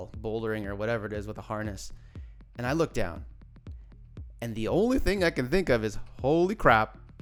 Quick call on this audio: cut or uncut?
uncut